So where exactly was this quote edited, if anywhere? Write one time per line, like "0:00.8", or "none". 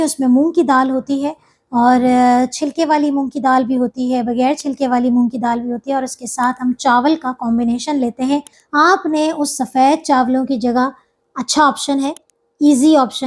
0:08.6